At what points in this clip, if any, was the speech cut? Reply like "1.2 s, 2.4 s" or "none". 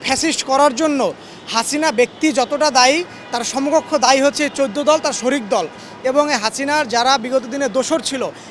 none